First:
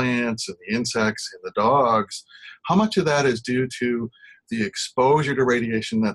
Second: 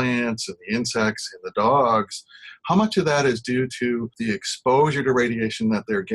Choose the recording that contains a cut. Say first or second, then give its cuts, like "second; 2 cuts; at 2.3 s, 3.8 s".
second; 1 cut; at 4.1 s